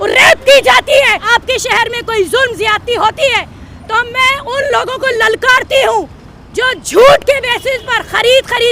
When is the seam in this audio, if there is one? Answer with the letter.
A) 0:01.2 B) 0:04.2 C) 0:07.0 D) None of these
A